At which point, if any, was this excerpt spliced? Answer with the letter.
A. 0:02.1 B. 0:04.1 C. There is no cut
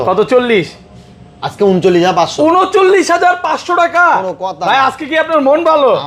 C